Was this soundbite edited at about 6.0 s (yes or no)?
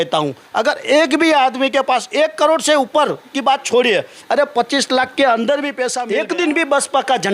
yes